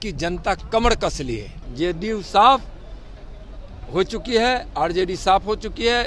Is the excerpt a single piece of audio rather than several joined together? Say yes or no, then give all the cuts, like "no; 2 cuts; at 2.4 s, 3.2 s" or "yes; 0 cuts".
no; 1 cut; at 1.6 s